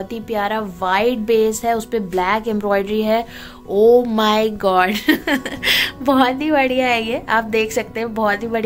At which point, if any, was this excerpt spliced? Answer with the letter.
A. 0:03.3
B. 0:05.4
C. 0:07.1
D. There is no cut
D